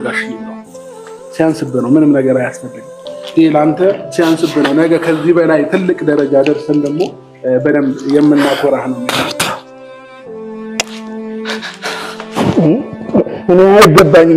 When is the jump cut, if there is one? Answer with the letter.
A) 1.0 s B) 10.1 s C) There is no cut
C